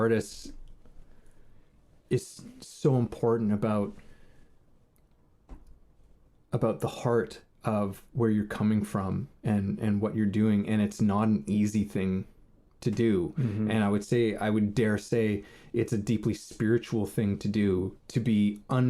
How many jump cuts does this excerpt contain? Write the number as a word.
one